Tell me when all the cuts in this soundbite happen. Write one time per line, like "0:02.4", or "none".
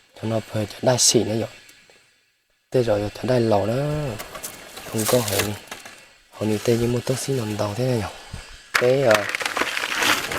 0:08.7